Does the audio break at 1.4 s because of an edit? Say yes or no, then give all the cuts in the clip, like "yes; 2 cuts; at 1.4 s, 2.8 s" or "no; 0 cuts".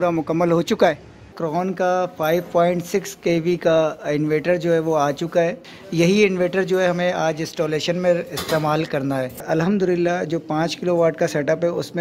yes; 3 cuts; at 1.4 s, 5.7 s, 9.4 s